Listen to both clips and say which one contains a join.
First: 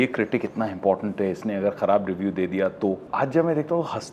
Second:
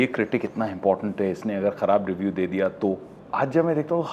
first; 1 cut; at 3.1 s

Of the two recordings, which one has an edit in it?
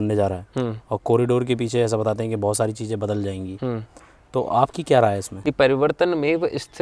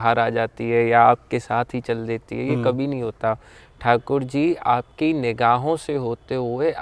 first; 1 cut; at 5.3 s

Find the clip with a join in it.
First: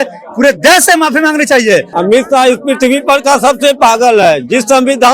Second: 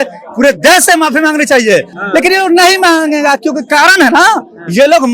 first; 1 cut; at 1.9 s

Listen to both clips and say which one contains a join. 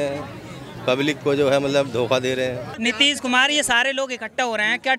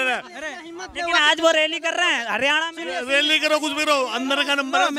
first; 1 cut; at 2.7 s

